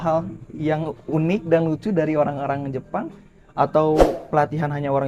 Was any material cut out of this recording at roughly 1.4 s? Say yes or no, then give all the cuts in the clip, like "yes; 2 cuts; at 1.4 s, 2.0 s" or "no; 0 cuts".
no; 0 cuts